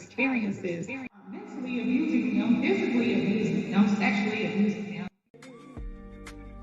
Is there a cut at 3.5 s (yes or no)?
no